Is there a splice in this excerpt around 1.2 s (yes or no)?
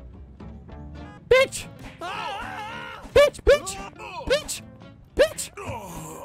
yes